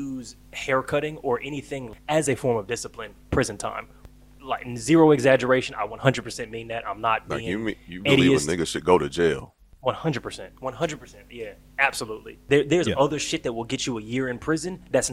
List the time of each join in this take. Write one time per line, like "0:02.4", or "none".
0:01.9
0:12.4